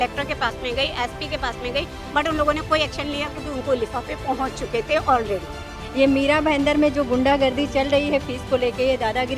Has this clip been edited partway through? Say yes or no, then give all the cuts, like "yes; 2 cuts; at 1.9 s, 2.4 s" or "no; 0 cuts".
yes; 2 cuts; at 2.0 s, 5.8 s